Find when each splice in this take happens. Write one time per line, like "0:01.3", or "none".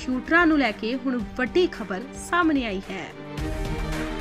0:03.1